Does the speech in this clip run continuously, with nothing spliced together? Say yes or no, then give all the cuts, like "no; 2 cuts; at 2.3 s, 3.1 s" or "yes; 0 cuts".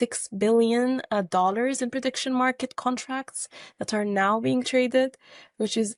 yes; 0 cuts